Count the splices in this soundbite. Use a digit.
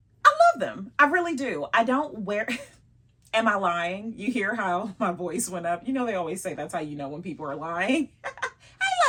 0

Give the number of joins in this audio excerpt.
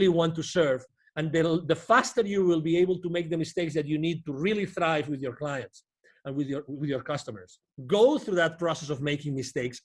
1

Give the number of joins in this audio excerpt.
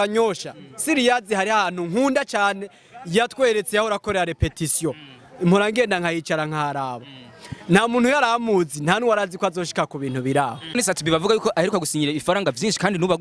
1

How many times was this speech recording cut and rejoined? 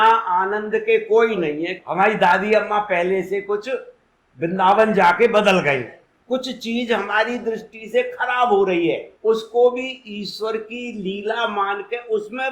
2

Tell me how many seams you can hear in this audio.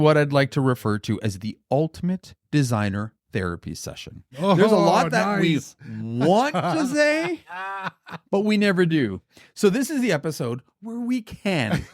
1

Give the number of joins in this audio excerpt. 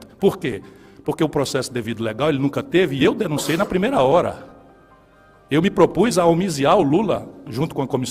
0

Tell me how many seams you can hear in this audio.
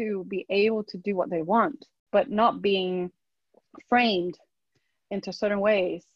1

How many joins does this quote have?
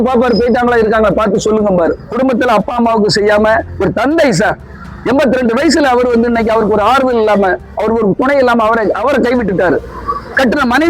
1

